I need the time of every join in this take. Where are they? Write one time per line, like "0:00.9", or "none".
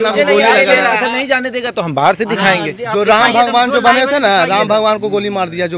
none